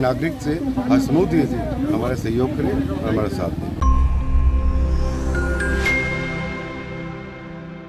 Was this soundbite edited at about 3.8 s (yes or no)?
yes